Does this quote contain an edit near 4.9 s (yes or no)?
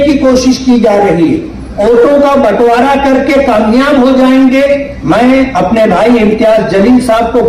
yes